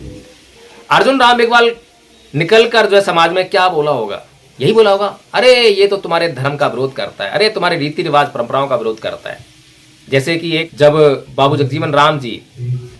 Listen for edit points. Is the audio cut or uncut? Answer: cut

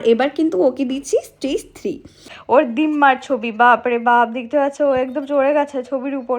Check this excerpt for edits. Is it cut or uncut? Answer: cut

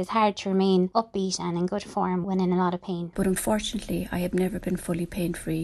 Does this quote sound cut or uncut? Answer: cut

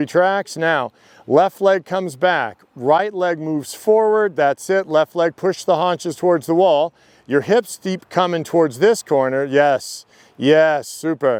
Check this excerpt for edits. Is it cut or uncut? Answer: uncut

